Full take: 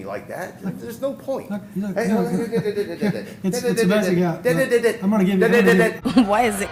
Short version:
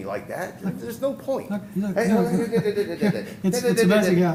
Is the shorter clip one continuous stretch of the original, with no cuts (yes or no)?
yes